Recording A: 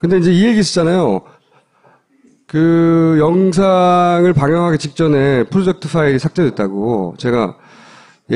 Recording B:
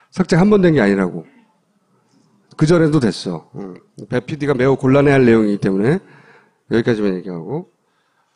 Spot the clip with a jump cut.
B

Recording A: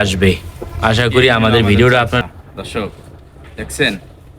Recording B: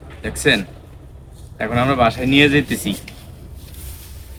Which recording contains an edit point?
A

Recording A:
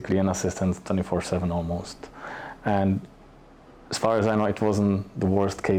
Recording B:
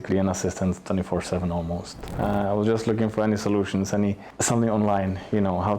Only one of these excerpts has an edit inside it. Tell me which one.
B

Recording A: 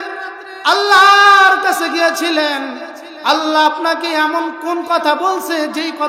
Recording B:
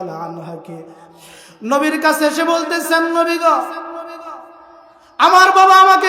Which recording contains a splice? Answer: B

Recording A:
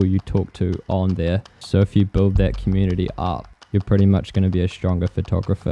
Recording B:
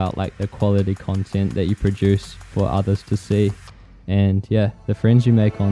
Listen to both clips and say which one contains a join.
A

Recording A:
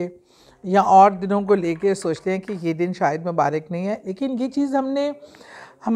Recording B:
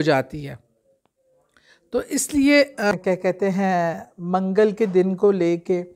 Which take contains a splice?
B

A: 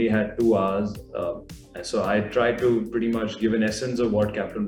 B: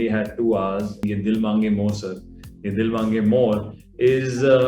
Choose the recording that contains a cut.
B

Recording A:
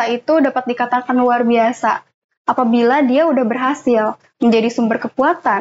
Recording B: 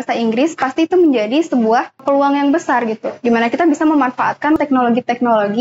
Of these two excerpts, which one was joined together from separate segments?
B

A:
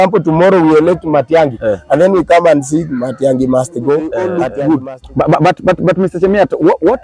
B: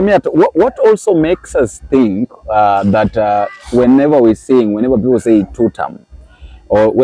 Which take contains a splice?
A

